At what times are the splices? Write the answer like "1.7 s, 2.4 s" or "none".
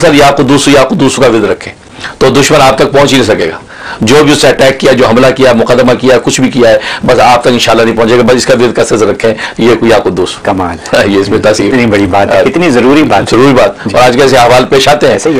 none

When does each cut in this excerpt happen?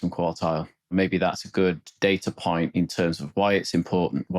0.9 s

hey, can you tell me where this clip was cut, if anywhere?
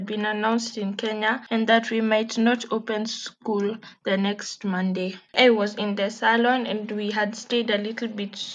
1.4 s, 5.2 s

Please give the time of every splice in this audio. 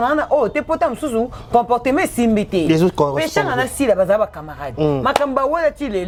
none

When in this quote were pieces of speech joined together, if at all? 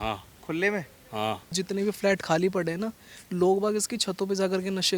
1.6 s

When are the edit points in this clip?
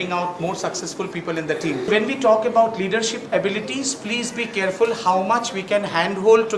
1.8 s

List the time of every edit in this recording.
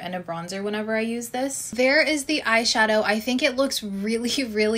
1.7 s

